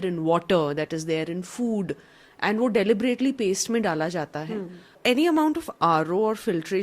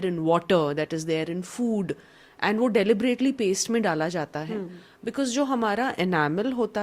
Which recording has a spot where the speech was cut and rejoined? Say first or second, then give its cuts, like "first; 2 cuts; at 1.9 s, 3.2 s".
first; 1 cut; at 4.9 s